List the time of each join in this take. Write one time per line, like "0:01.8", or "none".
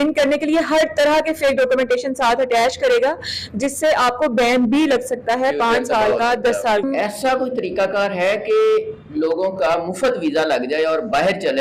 0:06.8